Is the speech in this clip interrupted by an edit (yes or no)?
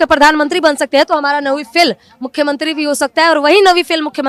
no